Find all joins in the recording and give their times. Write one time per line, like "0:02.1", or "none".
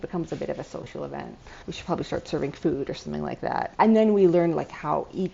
0:03.7